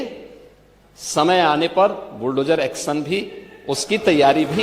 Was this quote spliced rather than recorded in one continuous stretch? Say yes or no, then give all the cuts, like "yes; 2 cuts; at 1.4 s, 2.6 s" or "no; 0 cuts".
no; 0 cuts